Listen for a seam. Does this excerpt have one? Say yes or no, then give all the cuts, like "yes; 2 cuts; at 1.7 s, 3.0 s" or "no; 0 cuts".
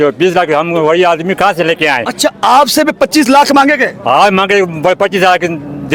no; 0 cuts